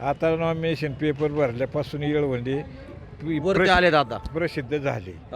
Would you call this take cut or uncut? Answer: uncut